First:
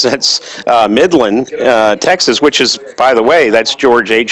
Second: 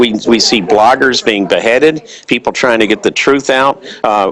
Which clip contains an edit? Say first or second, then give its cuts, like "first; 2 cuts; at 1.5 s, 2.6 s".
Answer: first; 1 cut; at 2.8 s